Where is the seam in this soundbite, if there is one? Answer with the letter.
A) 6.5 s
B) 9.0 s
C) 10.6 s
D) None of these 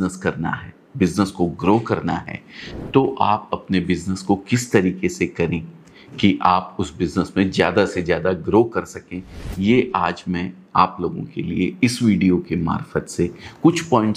D